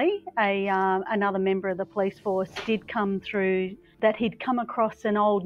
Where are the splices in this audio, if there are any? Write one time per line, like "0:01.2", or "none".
0:03.8